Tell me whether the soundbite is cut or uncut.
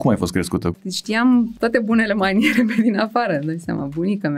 cut